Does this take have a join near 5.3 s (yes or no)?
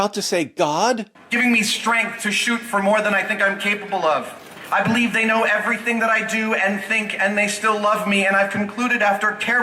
no